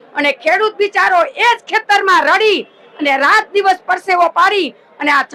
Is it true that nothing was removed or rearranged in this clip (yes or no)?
yes